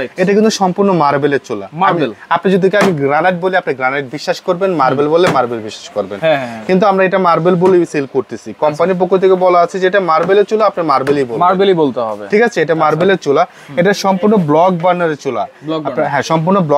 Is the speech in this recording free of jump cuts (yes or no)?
yes